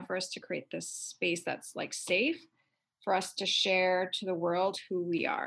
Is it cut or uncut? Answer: uncut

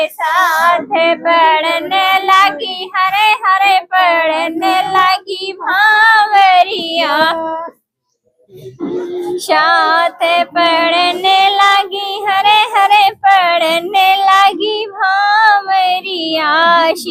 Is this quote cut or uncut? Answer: uncut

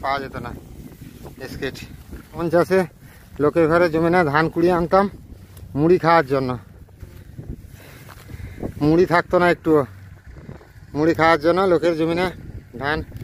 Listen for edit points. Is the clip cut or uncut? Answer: cut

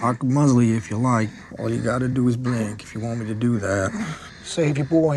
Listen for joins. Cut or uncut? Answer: uncut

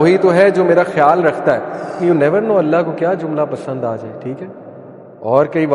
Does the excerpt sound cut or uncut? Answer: cut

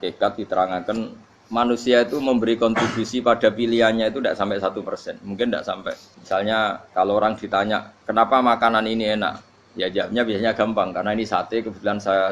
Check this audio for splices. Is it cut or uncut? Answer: cut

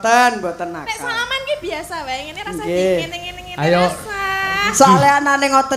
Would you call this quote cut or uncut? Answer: uncut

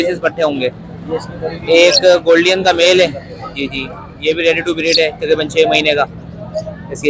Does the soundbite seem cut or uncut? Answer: uncut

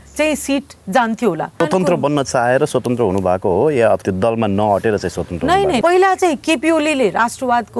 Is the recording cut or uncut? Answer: cut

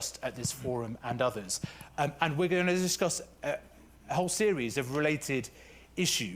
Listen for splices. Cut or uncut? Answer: cut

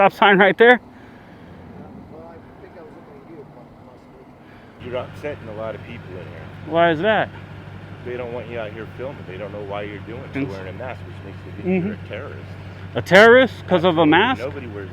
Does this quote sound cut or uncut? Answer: cut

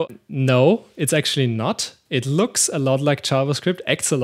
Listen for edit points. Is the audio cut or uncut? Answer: uncut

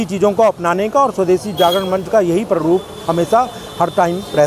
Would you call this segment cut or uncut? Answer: uncut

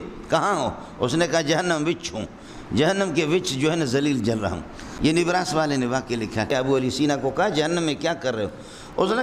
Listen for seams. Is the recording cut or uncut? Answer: cut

